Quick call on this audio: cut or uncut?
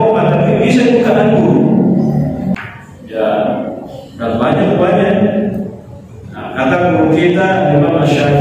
cut